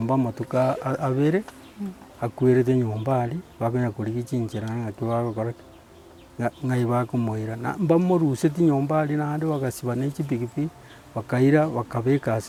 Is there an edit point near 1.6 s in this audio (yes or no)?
no